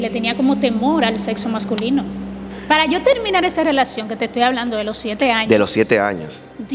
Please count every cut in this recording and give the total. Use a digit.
1